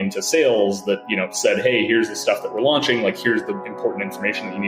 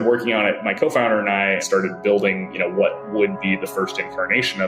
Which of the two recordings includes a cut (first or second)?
second